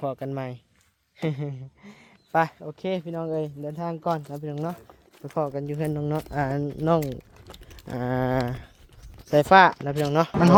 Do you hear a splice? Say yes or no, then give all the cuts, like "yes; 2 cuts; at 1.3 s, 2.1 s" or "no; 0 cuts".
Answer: no; 0 cuts